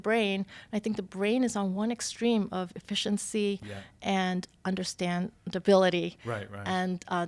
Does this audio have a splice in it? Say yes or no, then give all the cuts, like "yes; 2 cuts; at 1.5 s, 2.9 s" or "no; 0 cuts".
no; 0 cuts